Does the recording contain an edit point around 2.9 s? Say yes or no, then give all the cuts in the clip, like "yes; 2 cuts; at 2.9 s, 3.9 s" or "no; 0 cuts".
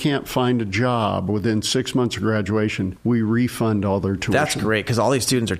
yes; 1 cut; at 2.9 s